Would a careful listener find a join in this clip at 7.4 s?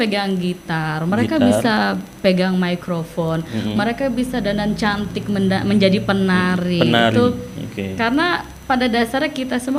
no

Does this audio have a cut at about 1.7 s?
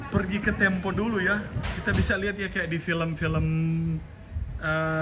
yes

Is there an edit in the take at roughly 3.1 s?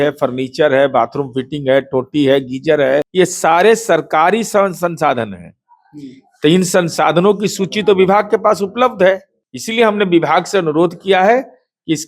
yes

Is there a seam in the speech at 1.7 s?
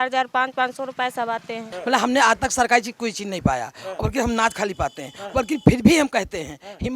yes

